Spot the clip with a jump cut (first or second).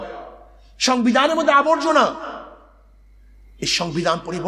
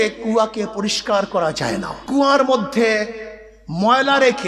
second